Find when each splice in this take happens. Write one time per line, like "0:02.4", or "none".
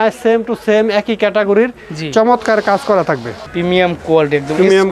0:03.4